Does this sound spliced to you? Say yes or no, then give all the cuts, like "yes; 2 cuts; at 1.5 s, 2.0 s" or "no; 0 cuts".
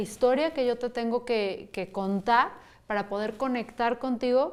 no; 0 cuts